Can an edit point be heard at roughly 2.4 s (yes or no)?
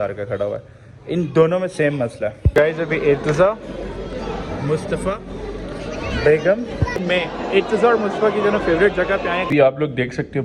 yes